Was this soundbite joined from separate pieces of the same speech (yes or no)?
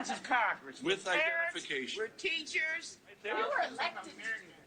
no